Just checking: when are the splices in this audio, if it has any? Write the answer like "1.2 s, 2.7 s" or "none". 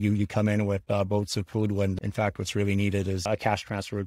2.0 s, 3.3 s